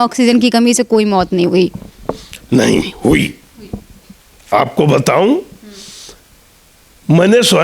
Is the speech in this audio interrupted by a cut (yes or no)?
no